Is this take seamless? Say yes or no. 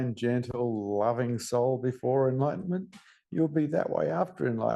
yes